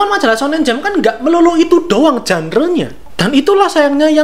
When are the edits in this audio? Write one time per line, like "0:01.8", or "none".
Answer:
0:03.0